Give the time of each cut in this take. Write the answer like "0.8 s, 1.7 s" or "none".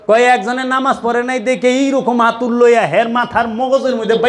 none